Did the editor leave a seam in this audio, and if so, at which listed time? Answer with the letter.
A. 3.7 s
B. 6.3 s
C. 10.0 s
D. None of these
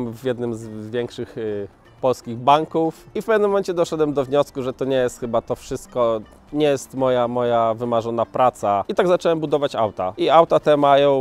C